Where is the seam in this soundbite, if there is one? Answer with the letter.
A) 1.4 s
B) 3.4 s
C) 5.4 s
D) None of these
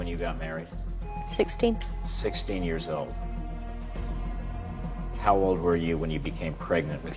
D